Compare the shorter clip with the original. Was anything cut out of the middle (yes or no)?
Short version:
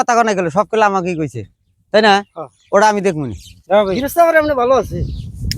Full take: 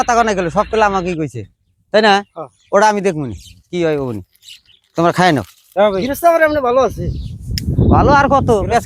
yes